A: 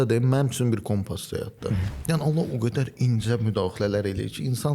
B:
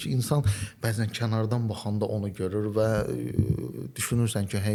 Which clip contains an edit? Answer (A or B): A